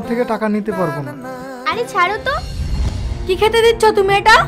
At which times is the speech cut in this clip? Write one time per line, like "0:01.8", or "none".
0:02.6